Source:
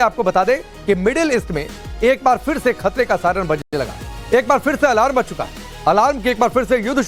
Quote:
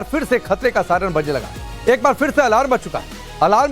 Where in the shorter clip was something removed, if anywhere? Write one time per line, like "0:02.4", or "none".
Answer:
0:01.3